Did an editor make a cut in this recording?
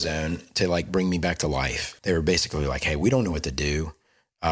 yes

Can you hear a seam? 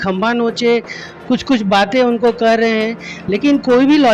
no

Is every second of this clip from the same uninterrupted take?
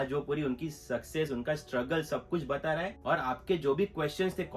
no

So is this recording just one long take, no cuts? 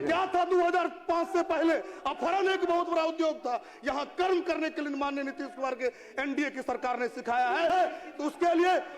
no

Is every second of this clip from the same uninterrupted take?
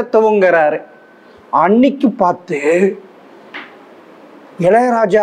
yes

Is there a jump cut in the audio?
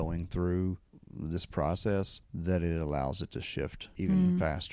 yes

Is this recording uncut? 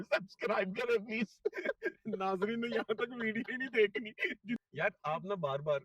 no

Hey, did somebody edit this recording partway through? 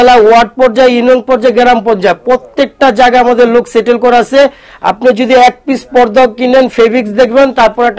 no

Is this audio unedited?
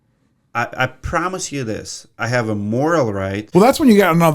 no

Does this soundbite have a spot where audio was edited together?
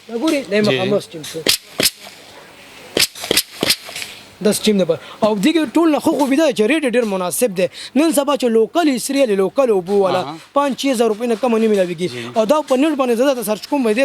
no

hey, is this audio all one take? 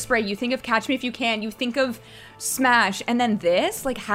yes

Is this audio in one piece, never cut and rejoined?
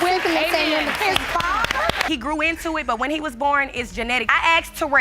no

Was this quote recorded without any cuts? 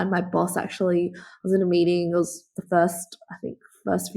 yes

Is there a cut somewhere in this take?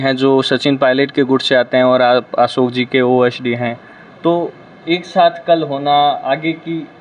no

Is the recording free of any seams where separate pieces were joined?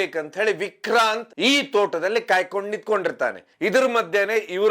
no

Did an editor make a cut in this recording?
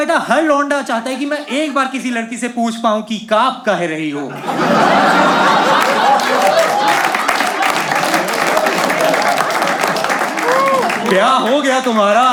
no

